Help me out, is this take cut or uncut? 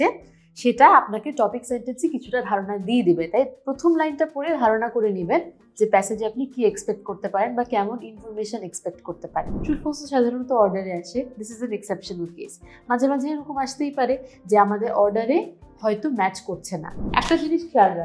cut